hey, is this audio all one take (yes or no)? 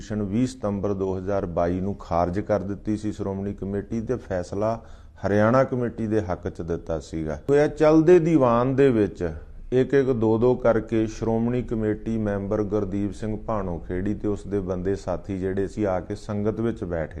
no